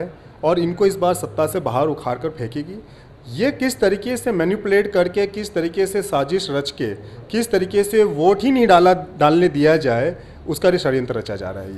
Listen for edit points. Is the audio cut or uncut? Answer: uncut